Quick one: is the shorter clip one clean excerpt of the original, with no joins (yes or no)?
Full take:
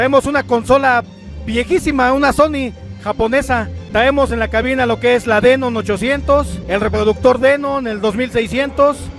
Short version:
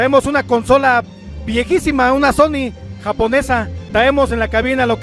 yes